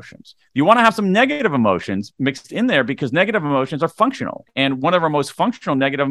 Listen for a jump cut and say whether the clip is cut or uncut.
uncut